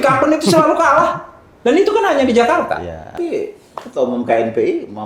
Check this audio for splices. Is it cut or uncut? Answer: cut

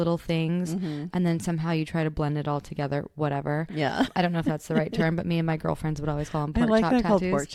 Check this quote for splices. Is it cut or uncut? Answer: uncut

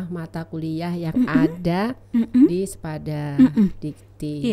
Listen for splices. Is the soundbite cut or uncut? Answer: uncut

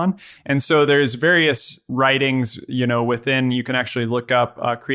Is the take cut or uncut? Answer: uncut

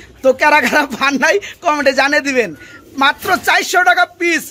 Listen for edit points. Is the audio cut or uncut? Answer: uncut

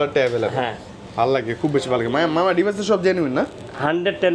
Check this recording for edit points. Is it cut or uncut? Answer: uncut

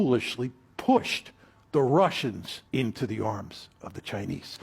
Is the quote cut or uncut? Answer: cut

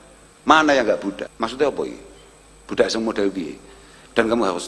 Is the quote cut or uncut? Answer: cut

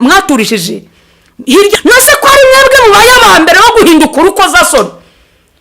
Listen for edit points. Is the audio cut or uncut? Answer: cut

